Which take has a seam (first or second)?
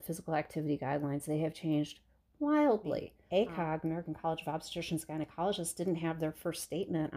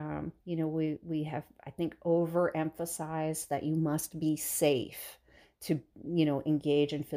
first